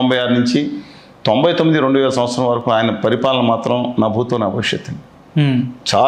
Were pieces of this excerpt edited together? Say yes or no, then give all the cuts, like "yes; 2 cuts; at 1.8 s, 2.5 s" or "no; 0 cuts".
no; 0 cuts